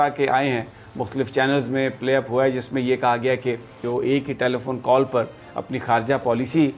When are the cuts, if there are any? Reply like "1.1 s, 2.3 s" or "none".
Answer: 3.8 s